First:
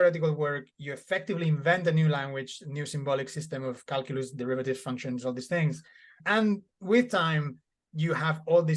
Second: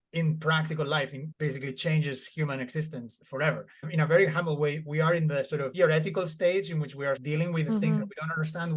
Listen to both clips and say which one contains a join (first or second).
second